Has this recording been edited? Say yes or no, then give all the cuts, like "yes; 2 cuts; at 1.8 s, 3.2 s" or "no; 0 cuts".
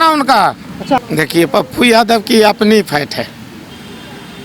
yes; 1 cut; at 1.0 s